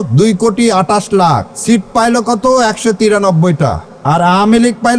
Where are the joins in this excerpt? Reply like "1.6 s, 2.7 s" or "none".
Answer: 1.5 s, 3.9 s